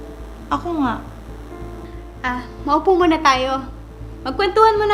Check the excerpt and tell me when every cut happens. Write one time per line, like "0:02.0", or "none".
none